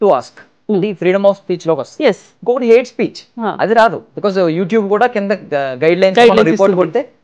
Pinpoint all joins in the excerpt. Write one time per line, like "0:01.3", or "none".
none